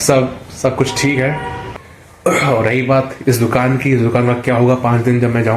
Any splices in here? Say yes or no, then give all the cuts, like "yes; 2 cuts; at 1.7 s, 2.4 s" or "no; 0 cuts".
yes; 1 cut; at 1.6 s